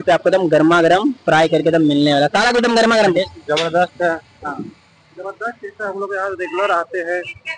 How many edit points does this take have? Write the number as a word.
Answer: one